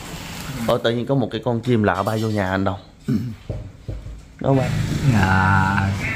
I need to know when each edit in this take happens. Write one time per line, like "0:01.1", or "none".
0:04.6